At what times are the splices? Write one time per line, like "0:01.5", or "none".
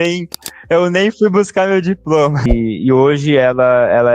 0:02.4